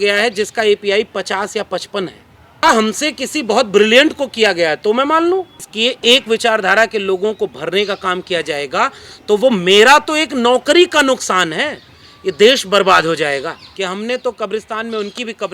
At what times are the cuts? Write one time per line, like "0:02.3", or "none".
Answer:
0:02.6
0:05.6
0:13.6

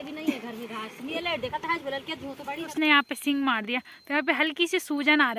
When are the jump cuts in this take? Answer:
0:02.7

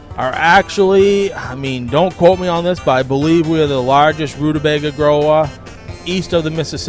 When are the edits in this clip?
none

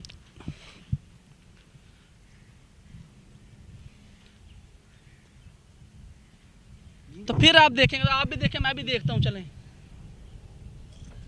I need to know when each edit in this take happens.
0:07.1

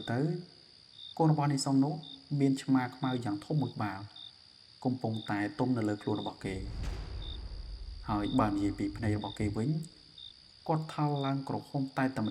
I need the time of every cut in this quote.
0:06.7
0:07.9

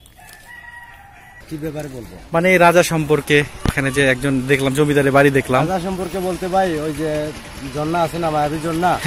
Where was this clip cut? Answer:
0:01.4

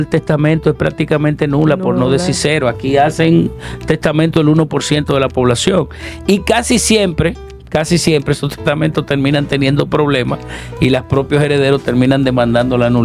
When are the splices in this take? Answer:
none

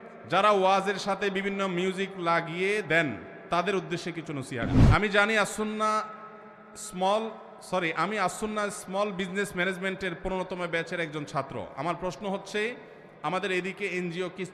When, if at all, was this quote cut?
0:04.8

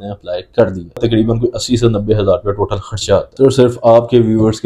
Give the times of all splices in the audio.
0:01.0
0:03.3

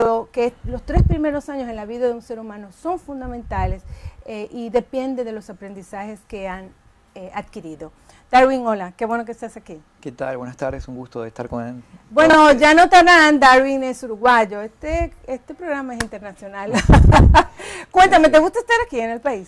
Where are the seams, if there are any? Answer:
none

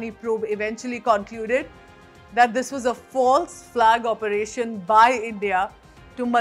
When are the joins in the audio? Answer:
none

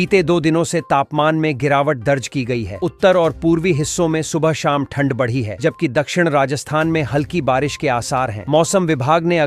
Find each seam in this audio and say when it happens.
none

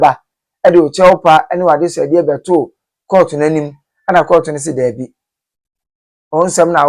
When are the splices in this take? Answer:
none

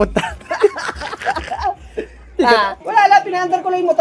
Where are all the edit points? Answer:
0:02.8

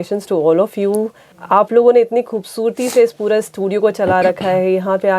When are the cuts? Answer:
0:01.2

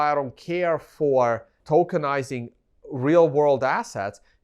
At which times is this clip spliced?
0:01.5

